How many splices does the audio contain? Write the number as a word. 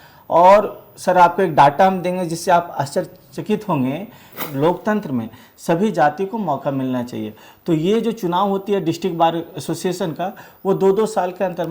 one